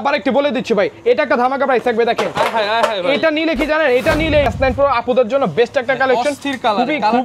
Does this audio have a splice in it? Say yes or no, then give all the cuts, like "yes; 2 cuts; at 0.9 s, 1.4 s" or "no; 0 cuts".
yes; 1 cut; at 4.5 s